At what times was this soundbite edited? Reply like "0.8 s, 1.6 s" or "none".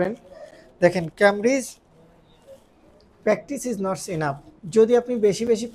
4.5 s